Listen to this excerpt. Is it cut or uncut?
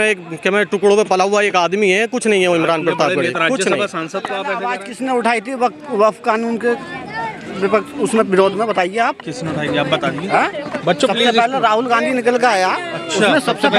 cut